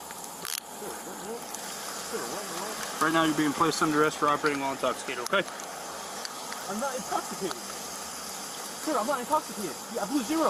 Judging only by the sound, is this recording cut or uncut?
uncut